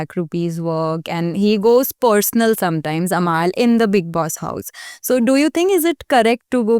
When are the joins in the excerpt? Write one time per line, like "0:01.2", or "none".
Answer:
none